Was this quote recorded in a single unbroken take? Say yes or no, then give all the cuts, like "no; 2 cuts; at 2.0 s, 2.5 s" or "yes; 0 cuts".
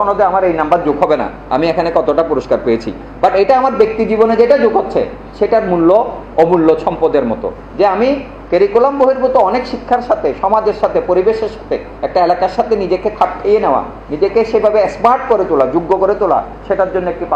yes; 0 cuts